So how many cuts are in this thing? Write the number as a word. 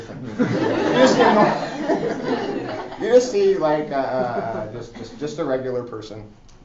zero